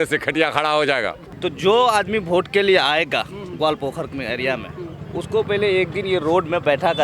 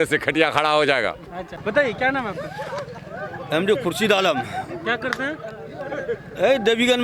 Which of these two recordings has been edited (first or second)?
first